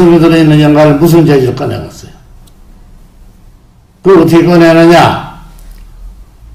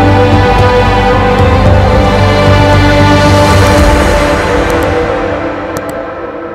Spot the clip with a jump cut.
first; 1 cut; at 3.9 s

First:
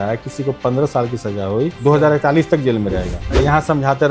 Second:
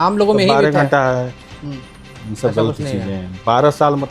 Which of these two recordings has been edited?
first; 2 cuts; at 1.8 s, 3.2 s

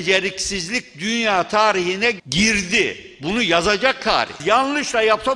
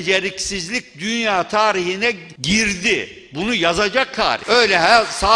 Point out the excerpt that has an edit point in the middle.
first; 2 cuts; at 2.2 s, 4.3 s

